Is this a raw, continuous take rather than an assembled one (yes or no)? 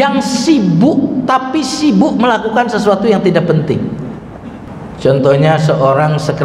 no